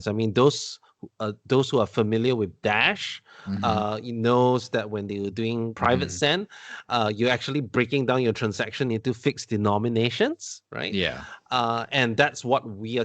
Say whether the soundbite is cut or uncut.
cut